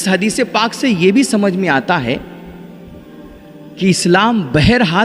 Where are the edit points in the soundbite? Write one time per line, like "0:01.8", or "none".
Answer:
none